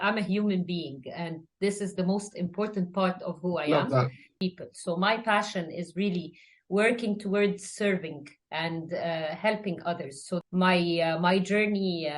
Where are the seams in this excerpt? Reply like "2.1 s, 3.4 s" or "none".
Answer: 4.3 s, 10.4 s